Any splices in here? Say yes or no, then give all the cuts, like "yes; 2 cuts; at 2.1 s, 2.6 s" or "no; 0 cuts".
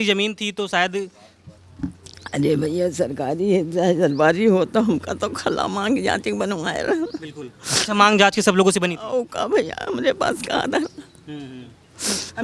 no; 0 cuts